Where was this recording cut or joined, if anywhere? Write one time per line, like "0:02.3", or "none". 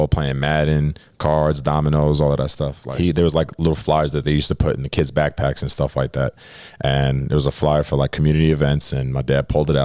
0:02.8